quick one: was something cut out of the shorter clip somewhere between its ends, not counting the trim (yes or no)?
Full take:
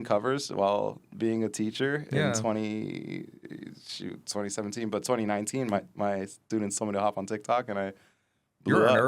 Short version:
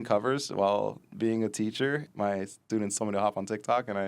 yes